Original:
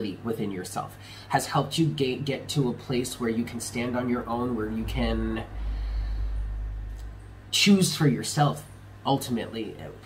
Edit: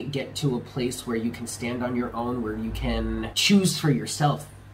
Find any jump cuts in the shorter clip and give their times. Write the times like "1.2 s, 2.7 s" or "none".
3.4 s